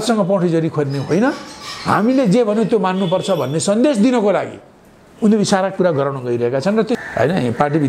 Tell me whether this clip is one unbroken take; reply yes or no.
no